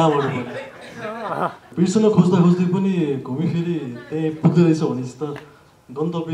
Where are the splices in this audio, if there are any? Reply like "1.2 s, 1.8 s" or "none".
1.7 s